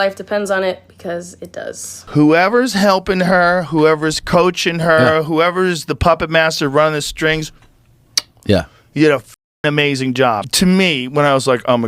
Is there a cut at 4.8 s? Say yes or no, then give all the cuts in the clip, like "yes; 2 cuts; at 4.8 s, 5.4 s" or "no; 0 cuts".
no; 2 cuts; at 2.0 s, 10.4 s